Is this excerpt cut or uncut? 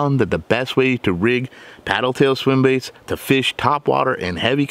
uncut